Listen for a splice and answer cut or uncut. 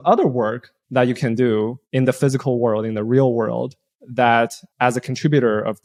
uncut